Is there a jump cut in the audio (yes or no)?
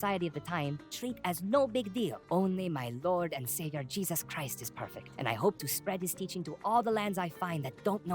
yes